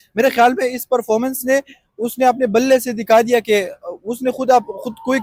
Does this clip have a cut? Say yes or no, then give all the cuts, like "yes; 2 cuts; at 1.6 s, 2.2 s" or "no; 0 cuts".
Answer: no; 0 cuts